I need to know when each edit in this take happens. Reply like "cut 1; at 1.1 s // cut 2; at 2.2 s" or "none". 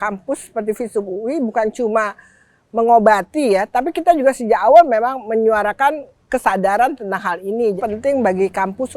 cut 1; at 7.8 s